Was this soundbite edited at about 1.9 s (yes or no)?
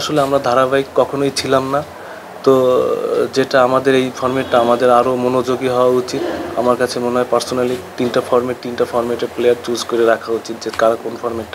no